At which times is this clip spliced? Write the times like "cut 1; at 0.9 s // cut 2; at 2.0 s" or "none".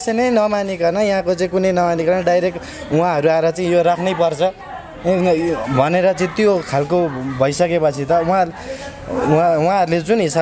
none